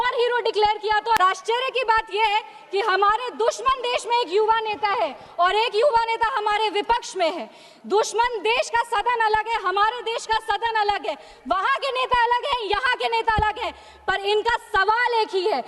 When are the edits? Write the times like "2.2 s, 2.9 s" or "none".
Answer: 1.2 s